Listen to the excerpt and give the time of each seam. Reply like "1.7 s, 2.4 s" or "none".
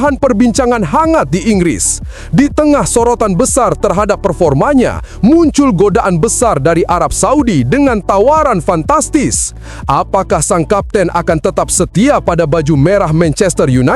none